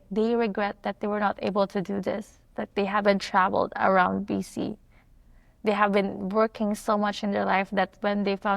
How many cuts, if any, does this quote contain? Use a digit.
0